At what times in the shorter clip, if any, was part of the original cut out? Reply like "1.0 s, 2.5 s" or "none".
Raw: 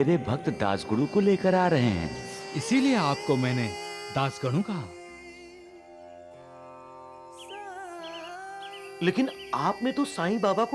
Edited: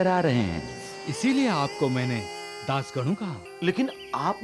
3.5 s